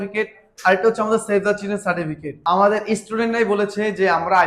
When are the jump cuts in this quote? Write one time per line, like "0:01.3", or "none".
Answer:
0:02.3